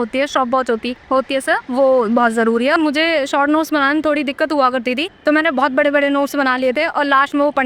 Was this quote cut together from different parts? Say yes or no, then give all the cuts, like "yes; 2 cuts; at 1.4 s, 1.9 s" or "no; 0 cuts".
yes; 3 cuts; at 0.9 s, 2.7 s, 5.1 s